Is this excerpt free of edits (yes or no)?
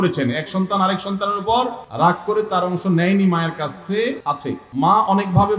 no